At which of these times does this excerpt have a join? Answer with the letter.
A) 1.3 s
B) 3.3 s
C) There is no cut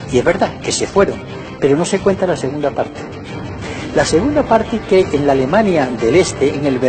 A